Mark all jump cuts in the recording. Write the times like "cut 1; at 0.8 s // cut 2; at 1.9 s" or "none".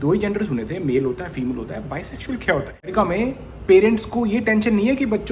cut 1; at 2.9 s